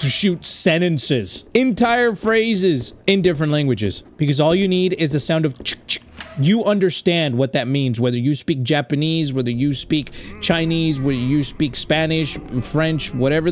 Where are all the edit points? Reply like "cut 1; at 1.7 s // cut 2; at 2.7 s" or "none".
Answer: cut 1; at 1.4 s // cut 2; at 2.9 s // cut 3; at 4.0 s

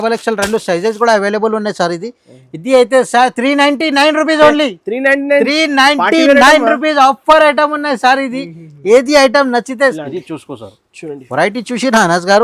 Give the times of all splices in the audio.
cut 1; at 10.0 s

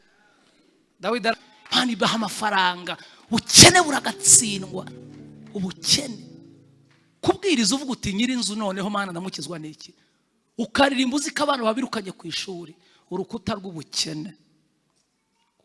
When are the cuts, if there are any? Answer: cut 1; at 1.3 s

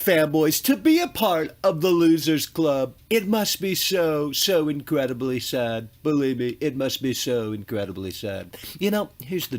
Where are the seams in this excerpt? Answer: none

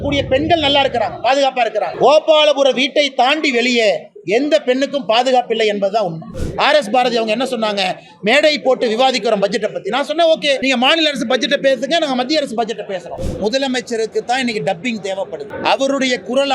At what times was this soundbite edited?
cut 1; at 1.9 s // cut 2; at 6.3 s // cut 3; at 10.6 s // cut 4; at 13.2 s // cut 5; at 15.5 s

